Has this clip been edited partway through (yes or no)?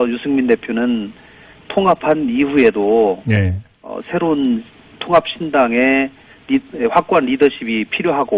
yes